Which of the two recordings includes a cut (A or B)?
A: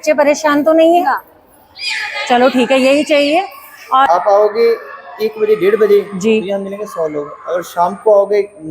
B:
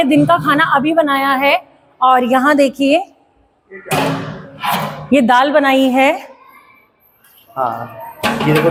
A